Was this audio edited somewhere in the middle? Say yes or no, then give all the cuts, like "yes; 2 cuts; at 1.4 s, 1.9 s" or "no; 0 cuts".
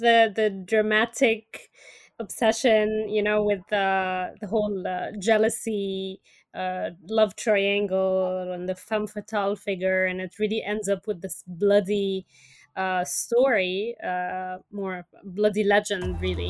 no; 0 cuts